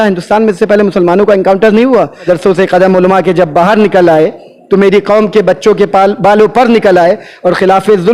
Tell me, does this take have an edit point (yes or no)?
yes